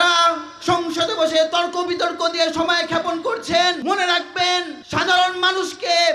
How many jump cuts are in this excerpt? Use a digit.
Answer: 1